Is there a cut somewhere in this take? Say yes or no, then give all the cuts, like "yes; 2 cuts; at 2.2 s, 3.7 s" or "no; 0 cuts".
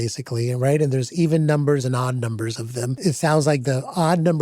yes; 1 cut; at 3.0 s